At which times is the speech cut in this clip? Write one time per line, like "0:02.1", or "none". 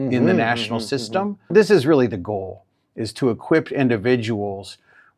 0:01.5